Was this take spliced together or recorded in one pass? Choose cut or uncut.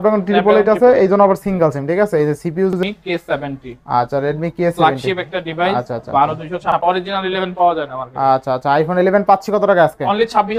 cut